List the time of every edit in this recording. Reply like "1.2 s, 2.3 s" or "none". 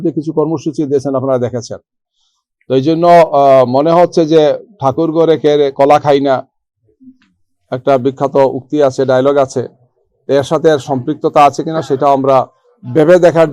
none